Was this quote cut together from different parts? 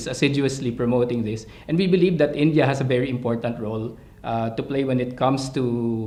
no; 0 cuts

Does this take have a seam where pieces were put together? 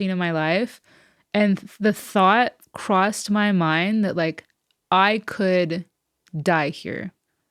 no; 0 cuts

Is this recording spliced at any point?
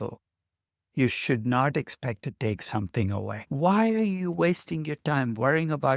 yes; 1 cut; at 3.4 s

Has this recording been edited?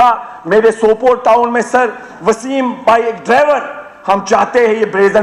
no; 0 cuts

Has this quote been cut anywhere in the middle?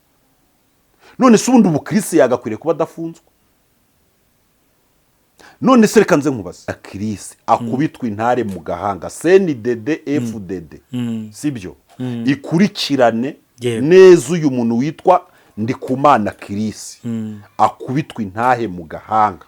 yes; 1 cut; at 6.8 s

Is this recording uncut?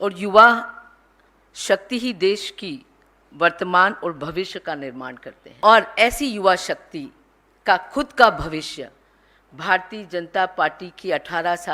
no; 1 cut; at 5.4 s

